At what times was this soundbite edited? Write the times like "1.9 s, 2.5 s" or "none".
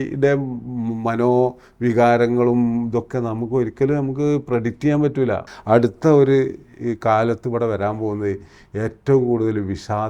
5.5 s

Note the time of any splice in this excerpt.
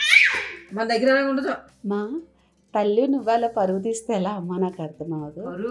1.7 s

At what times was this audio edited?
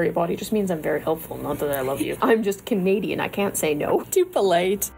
2.1 s, 4.1 s

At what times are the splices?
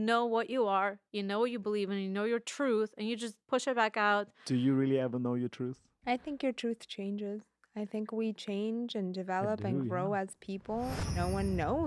3.4 s, 5.9 s, 10.9 s

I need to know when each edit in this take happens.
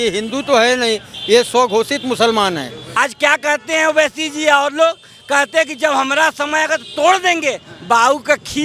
2.8 s

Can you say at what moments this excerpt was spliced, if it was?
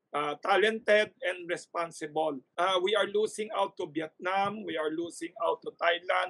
2.4 s

